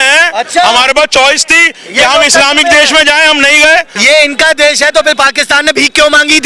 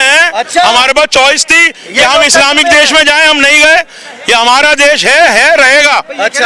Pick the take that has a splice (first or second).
first